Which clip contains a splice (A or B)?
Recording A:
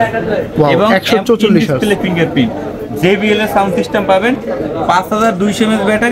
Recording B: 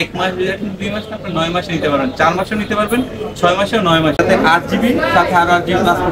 B